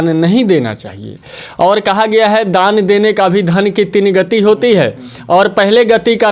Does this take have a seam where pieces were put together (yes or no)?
no